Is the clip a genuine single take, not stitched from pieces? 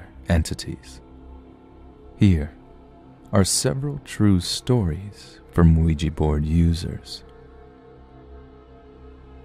yes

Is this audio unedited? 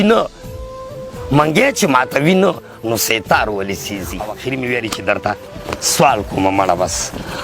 no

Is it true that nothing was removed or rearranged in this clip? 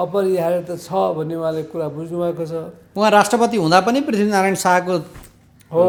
yes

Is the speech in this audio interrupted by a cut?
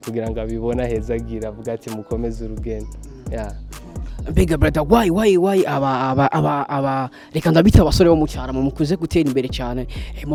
no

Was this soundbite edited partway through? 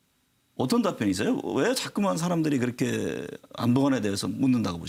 no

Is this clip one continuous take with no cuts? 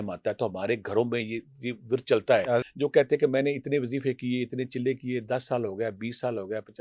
no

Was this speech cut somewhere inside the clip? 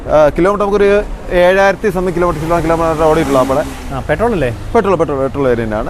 no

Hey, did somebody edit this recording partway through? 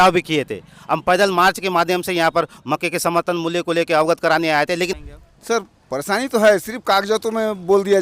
yes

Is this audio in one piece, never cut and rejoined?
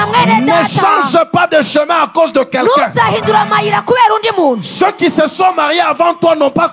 yes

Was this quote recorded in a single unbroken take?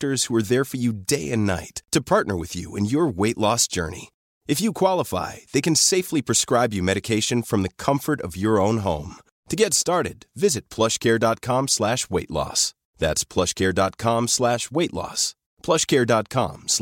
yes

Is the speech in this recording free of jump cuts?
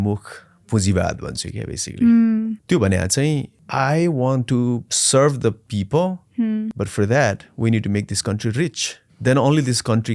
no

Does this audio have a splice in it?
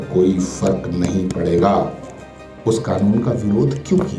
no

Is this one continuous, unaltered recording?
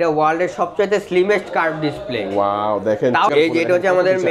no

